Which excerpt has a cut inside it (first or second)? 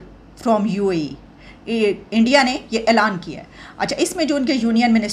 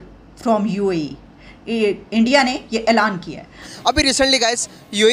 second